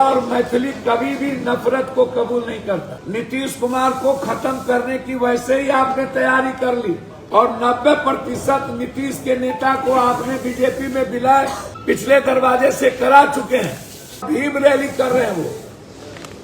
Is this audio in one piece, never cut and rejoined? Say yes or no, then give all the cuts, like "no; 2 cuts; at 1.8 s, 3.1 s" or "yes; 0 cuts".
no; 4 cuts; at 3.0 s, 7.1 s, 11.7 s, 14.2 s